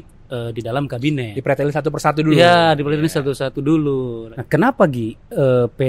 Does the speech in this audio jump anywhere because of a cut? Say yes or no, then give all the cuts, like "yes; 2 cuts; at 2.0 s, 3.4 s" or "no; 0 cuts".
no; 0 cuts